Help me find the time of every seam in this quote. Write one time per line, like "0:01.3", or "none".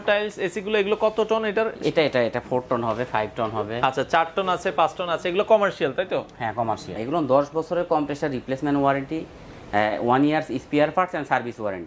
0:07.0